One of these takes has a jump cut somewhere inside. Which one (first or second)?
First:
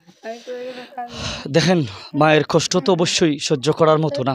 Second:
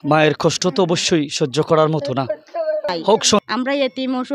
second